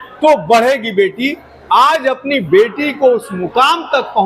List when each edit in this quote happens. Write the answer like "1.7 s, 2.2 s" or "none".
none